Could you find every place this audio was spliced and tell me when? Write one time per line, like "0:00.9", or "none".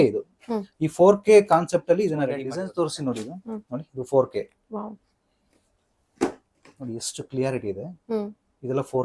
0:02.4